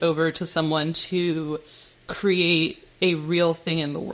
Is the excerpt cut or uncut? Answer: uncut